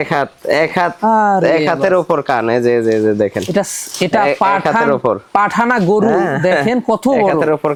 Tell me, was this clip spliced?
no; 0 cuts

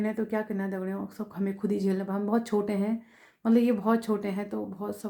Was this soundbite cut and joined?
no; 0 cuts

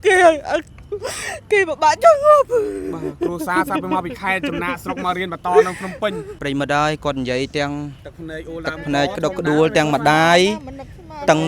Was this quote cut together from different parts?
yes; 1 cut; at 6.3 s

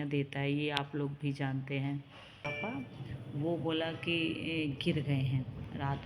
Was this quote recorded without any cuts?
no; 1 cut; at 2.5 s

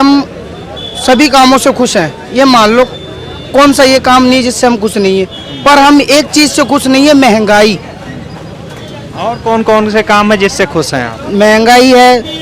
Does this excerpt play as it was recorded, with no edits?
yes; 0 cuts

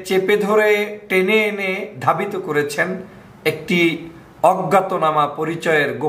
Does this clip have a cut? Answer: no; 0 cuts

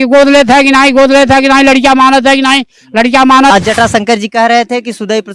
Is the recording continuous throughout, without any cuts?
no; 1 cut; at 3.5 s

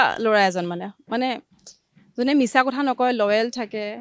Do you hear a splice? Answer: no; 0 cuts

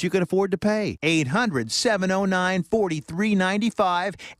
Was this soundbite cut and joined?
no; 0 cuts

